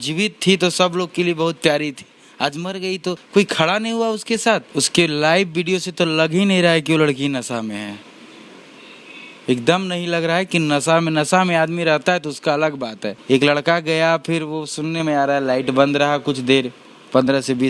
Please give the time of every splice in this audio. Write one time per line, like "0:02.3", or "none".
0:03.2
0:04.7
0:13.1